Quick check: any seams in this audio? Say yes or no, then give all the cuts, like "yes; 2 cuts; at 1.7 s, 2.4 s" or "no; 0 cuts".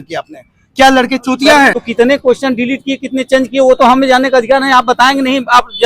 yes; 1 cut; at 1.8 s